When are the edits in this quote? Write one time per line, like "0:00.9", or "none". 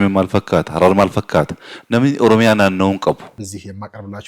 0:03.3